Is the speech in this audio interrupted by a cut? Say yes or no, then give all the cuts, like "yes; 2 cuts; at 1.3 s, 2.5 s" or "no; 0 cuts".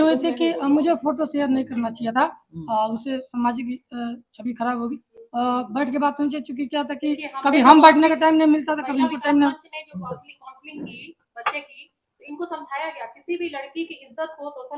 no; 0 cuts